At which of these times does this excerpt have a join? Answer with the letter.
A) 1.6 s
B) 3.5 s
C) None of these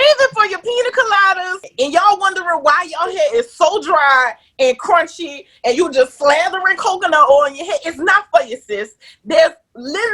A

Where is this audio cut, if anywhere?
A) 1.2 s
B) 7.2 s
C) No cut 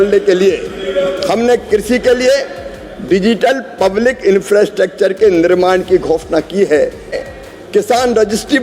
B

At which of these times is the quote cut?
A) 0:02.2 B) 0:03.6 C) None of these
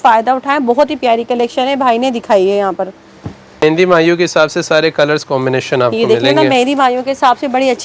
B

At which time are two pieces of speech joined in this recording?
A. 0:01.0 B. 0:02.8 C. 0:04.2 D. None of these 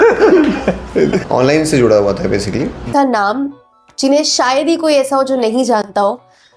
B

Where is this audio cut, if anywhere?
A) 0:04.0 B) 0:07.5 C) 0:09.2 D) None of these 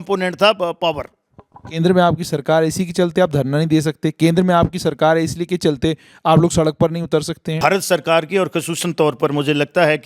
B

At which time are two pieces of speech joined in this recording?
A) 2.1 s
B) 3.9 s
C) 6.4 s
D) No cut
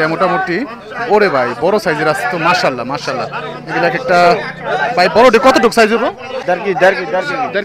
C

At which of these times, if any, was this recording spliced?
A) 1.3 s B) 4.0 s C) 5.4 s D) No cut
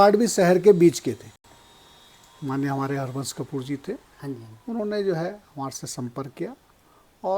A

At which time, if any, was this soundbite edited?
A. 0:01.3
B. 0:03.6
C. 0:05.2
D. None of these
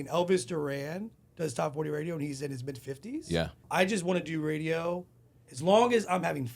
B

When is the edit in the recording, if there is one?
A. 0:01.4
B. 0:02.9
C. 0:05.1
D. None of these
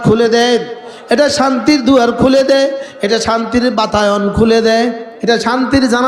C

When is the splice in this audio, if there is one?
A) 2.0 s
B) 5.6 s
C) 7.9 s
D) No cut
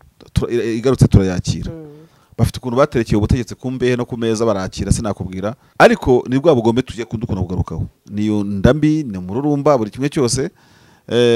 B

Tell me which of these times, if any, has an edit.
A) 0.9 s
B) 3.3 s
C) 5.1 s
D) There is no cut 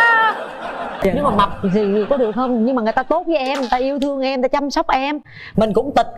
A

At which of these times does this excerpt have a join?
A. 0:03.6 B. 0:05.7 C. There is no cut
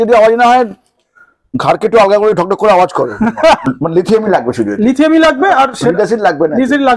A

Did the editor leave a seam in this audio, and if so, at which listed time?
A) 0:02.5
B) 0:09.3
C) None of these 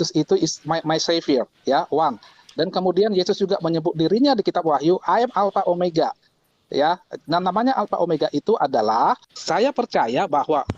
B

